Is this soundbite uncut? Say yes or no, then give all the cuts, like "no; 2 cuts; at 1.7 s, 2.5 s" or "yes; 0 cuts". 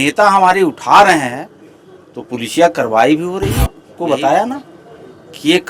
no; 1 cut; at 3.9 s